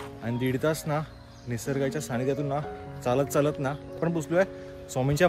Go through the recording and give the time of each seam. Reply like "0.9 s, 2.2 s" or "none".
3.9 s